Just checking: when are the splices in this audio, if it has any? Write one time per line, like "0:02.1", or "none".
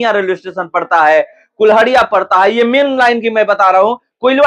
none